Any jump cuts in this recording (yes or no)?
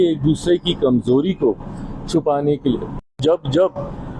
yes